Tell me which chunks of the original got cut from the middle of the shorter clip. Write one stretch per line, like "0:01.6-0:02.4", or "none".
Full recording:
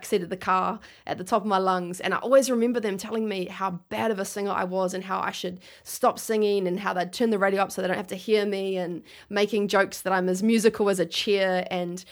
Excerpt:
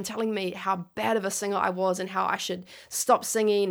none